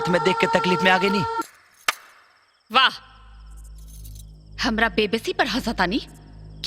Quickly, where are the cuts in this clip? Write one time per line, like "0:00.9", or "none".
0:01.4